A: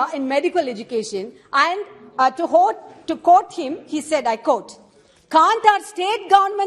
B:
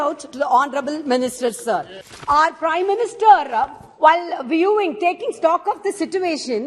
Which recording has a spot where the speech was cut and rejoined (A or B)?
B